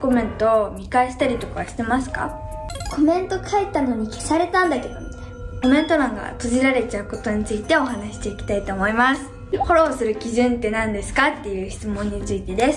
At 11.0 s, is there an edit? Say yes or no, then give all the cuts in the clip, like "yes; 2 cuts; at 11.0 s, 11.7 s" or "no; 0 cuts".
no; 3 cuts; at 2.8 s, 5.6 s, 9.7 s